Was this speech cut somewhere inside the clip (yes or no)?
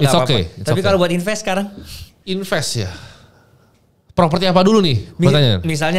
no